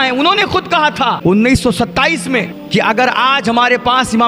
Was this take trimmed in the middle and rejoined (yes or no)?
yes